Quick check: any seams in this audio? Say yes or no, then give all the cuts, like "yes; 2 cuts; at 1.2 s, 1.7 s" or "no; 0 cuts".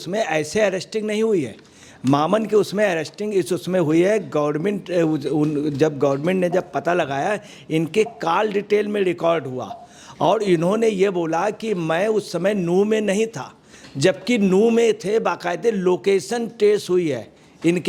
no; 0 cuts